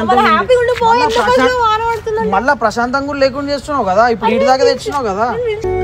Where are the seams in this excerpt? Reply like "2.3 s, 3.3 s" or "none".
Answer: none